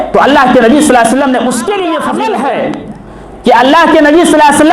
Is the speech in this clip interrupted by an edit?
yes; 1 cut; at 2.0 s

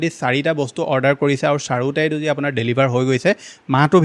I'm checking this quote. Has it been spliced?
no; 0 cuts

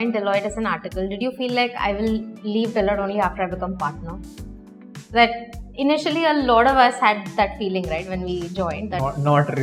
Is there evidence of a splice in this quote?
no; 0 cuts

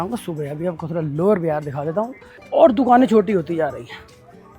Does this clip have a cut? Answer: yes; 1 cut; at 2.2 s

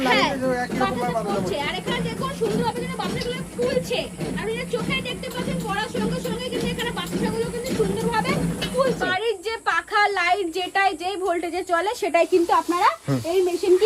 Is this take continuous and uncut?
no; 1 cut; at 9.0 s

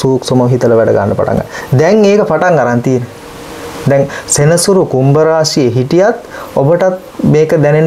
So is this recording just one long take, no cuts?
yes; 0 cuts

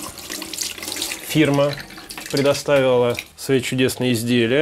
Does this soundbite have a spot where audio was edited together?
yes; 1 cut; at 3.3 s

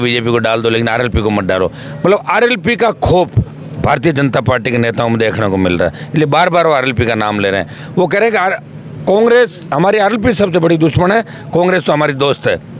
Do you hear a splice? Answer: no; 0 cuts

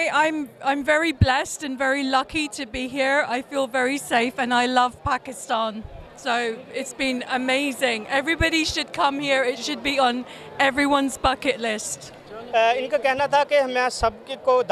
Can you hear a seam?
no; 0 cuts

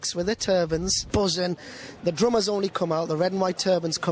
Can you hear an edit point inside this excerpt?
yes; 2 cuts; at 1.0 s, 1.8 s

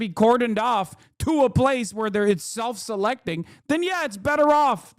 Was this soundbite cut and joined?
no; 0 cuts

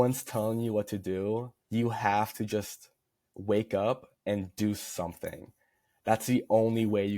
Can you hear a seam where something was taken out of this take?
yes; 2 cuts; at 1.6 s, 4.1 s

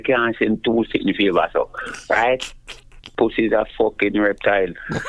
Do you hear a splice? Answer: yes; 1 cut; at 3.0 s

